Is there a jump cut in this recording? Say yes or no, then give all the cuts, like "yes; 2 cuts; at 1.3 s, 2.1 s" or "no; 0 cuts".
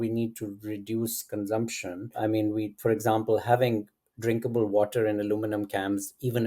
yes; 1 cut; at 2.2 s